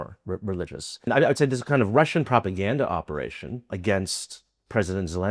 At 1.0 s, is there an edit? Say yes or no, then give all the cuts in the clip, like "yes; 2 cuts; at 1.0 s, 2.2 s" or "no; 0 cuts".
yes; 2 cuts; at 1.0 s, 3.7 s